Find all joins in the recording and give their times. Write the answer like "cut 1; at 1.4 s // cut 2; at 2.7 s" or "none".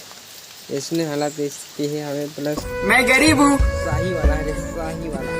cut 1; at 2.8 s